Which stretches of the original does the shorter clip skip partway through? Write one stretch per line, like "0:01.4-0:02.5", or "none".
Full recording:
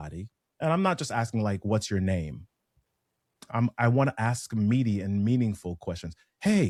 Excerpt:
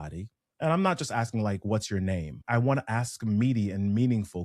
0:02.4-0:03.7